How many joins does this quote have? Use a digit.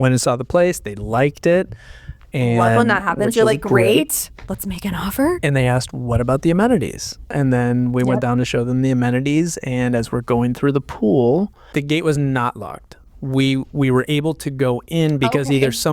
2